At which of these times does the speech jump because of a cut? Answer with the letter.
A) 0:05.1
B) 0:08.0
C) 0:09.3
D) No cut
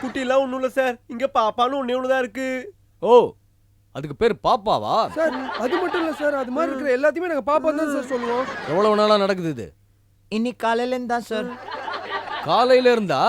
D